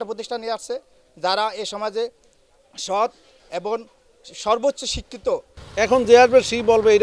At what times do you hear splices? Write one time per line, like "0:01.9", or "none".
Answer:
0:05.6